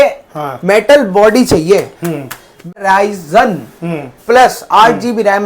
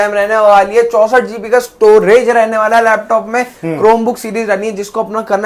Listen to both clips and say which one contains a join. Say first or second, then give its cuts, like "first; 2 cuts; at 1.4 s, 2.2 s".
first; 1 cut; at 2.7 s